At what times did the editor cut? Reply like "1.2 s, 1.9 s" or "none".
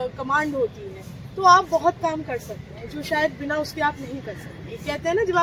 none